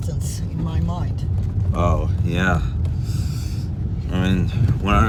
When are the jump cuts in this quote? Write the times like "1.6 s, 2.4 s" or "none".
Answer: none